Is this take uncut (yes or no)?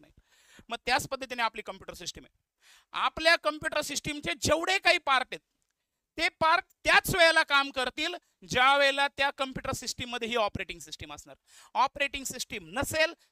yes